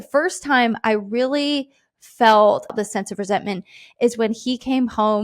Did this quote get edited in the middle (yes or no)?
yes